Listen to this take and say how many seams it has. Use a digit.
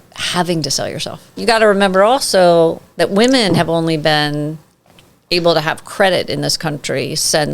1